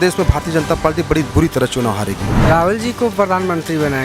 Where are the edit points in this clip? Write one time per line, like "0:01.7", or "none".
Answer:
0:02.2